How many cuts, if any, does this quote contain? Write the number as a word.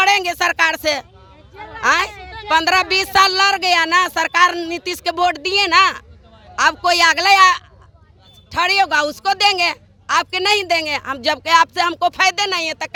zero